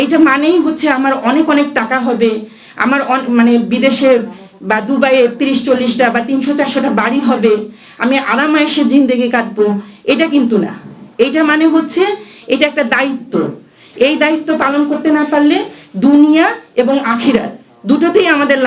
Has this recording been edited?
no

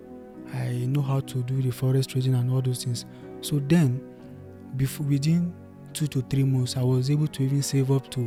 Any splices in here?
no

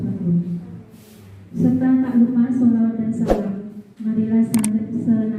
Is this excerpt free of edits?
yes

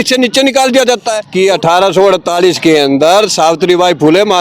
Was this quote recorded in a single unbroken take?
no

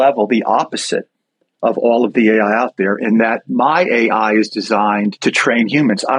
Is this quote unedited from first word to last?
no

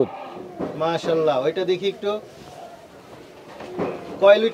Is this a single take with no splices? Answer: yes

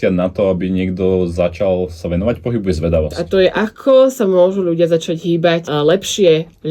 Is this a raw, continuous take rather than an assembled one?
no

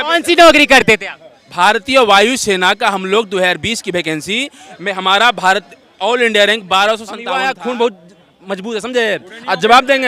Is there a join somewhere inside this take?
yes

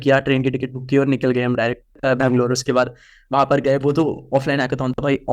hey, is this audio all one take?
no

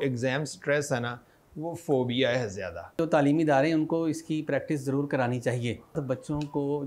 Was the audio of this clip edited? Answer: yes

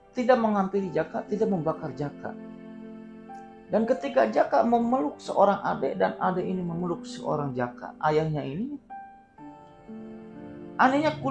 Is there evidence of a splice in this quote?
no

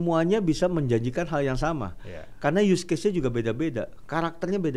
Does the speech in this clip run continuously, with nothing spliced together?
yes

